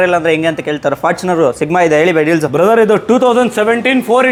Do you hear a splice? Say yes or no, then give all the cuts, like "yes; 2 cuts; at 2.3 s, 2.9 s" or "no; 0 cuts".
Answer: no; 0 cuts